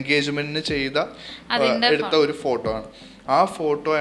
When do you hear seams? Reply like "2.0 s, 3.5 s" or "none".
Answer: none